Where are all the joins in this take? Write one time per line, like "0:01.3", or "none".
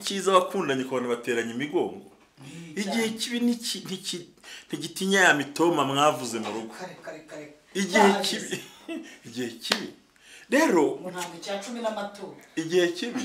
none